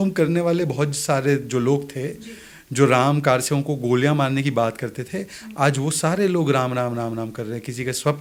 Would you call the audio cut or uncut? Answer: uncut